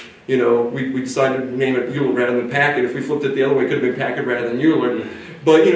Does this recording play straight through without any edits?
yes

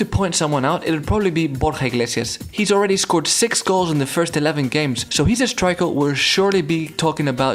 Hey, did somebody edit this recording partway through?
yes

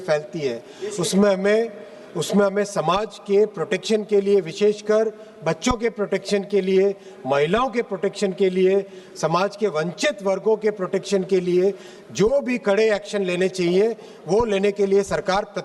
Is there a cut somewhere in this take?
no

